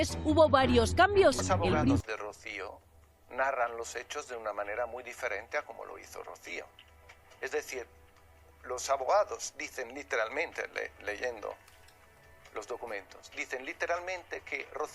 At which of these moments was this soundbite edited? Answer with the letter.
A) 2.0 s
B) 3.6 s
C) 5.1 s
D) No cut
A